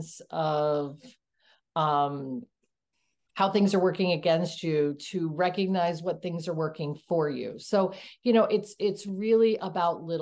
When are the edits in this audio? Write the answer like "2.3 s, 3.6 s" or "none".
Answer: none